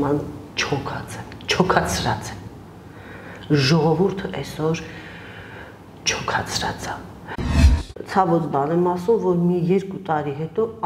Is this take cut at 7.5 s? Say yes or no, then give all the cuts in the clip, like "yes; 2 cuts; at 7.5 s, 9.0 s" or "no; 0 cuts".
yes; 1 cut; at 7.5 s